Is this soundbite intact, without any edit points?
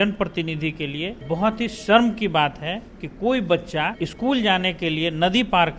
no; 2 cuts; at 1.2 s, 4.0 s

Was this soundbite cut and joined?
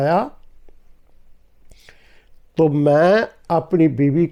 no; 0 cuts

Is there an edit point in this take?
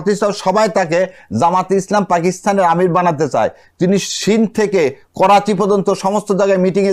no; 0 cuts

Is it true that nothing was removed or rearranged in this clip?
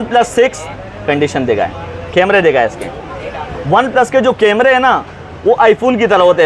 yes; 0 cuts

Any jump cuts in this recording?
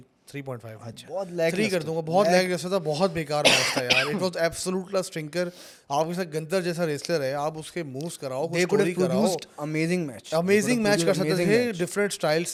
no; 0 cuts

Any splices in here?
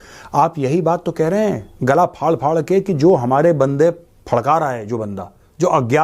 no; 0 cuts

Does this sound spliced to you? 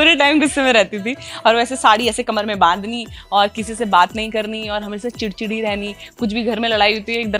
no; 0 cuts

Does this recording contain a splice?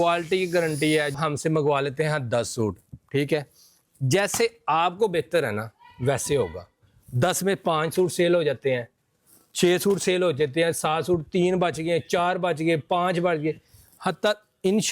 yes; 1 cut; at 1.1 s

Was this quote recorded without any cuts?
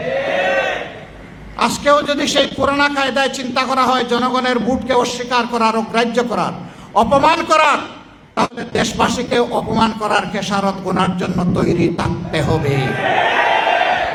yes; 0 cuts

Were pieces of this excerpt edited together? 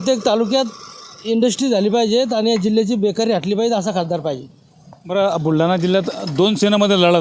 no; 0 cuts

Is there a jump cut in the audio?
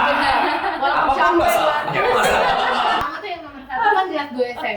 yes; 1 cut; at 3.0 s

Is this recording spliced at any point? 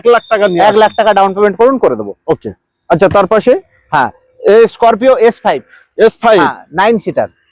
no; 0 cuts

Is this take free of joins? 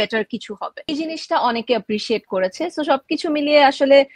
no; 1 cut; at 0.9 s

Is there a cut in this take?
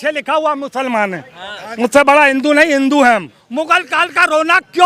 yes; 1 cut; at 3.4 s

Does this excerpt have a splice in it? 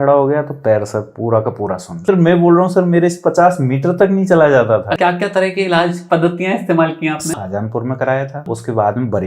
yes; 4 cuts; at 2.0 s, 4.9 s, 7.3 s, 8.4 s

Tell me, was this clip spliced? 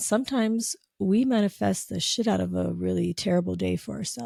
no; 0 cuts

